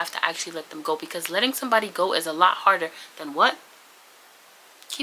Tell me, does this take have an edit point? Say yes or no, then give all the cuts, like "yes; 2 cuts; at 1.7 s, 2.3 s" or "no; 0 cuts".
no; 0 cuts